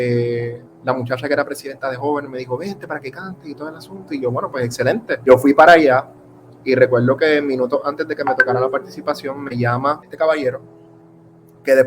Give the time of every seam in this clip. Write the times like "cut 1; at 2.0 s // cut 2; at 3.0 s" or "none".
cut 1; at 5.3 s // cut 2; at 10.0 s